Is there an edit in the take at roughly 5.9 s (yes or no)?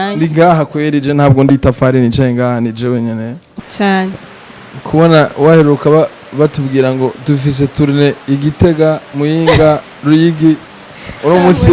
no